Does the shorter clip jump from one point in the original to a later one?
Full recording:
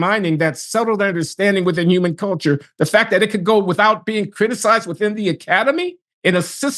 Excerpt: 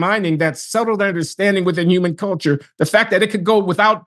no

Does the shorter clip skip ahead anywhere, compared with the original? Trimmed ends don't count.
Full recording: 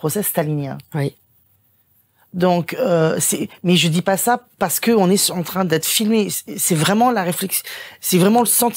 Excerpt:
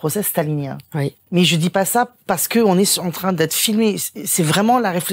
yes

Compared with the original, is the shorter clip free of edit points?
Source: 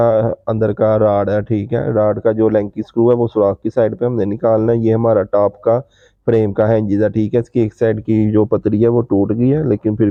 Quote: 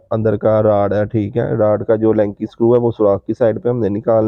yes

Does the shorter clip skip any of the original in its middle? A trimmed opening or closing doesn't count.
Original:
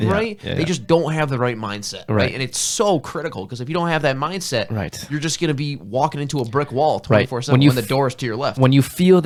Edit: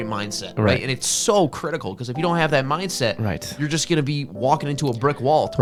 no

